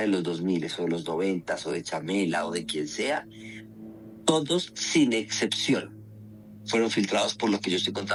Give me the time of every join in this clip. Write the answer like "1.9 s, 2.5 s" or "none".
none